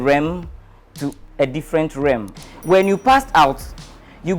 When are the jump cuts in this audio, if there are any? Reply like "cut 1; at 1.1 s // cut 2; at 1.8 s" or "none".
cut 1; at 2.3 s